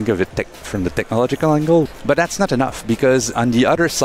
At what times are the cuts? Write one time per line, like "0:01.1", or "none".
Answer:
0:01.8
0:03.3